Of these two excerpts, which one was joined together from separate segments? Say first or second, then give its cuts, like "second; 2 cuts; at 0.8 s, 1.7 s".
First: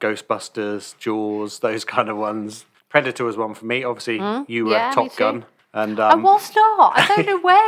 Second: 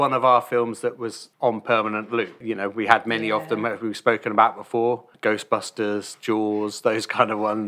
second; 1 cut; at 1.2 s